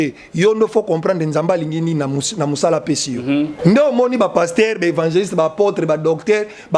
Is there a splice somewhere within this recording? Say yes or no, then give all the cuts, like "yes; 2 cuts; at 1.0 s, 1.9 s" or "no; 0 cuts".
yes; 1 cut; at 3.5 s